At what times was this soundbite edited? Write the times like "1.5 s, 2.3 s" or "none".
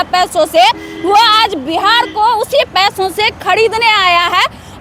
none